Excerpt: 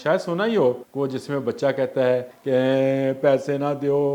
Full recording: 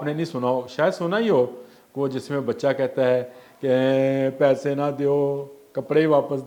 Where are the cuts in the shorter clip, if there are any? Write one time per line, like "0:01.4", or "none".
0:00.9
0:02.3